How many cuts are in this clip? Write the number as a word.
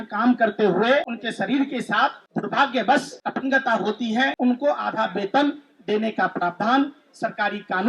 four